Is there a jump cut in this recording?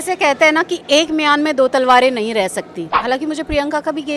yes; 1 cut; at 2.9 s

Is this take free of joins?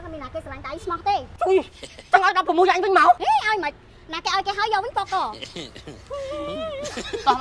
yes; 0 cuts

